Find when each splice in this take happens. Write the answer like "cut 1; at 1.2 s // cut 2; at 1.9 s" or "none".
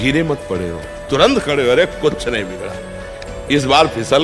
none